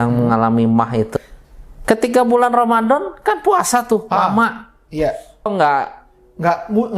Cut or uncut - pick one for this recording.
cut